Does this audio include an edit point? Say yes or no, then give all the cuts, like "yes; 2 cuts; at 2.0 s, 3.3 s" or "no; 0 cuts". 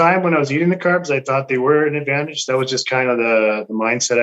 no; 0 cuts